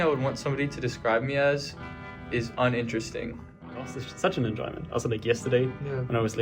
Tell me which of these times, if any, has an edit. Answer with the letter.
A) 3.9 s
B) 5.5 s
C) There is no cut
A